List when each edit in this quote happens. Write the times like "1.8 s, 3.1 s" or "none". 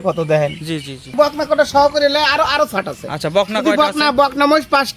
1.1 s